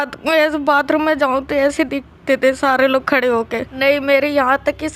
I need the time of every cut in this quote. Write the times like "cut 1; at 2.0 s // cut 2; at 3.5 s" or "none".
cut 1; at 3.7 s